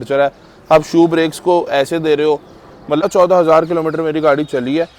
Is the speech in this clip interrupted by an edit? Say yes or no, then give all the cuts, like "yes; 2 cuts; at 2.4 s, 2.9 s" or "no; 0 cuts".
yes; 1 cut; at 3.0 s